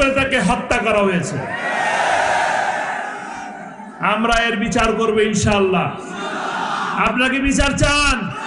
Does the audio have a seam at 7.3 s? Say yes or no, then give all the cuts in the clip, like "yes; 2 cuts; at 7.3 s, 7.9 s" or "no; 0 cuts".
no; 0 cuts